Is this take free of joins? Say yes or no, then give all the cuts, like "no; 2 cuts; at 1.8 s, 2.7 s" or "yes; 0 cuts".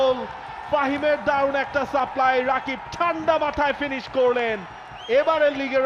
yes; 0 cuts